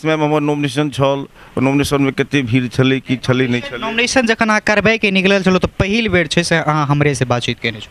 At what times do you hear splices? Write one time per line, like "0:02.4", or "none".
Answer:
none